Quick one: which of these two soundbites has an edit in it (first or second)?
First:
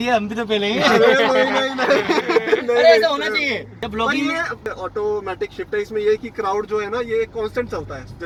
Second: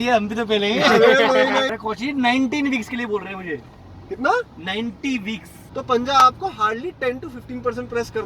second